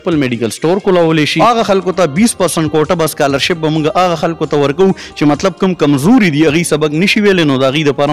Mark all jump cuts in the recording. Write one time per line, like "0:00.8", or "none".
0:01.4